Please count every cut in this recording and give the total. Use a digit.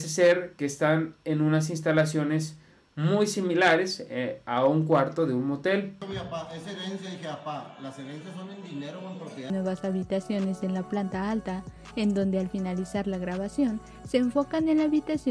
2